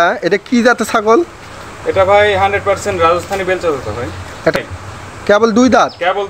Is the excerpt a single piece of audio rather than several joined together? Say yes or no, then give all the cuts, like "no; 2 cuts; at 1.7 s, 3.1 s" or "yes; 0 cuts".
no; 1 cut; at 4.7 s